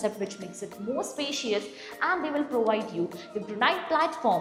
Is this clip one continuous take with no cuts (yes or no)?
yes